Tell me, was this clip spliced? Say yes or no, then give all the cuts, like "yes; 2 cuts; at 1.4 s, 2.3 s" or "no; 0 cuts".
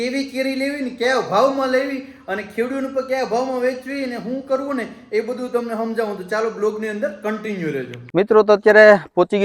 no; 0 cuts